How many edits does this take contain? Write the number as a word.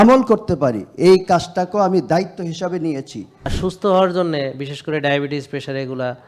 one